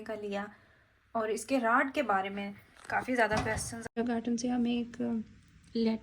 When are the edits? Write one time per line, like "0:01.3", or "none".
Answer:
0:03.9